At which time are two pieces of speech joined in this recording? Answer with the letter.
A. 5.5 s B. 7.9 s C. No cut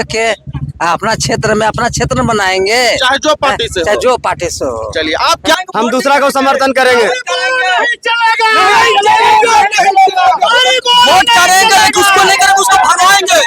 A